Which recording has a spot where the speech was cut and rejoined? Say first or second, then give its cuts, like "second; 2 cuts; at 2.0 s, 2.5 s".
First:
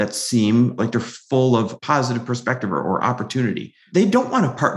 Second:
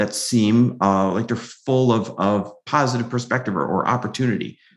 first; 2 cuts; at 0.8 s, 1.7 s